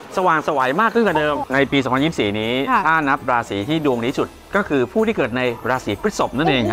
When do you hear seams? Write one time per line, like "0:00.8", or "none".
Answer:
0:01.4